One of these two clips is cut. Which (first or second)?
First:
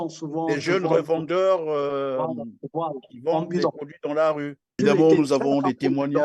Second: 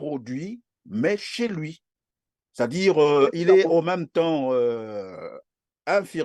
first